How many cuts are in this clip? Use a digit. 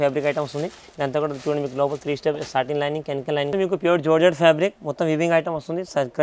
1